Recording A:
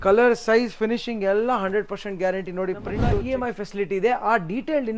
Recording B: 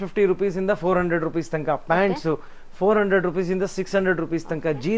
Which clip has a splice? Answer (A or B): A